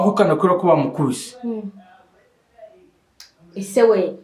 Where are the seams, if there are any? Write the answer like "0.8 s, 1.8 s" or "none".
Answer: none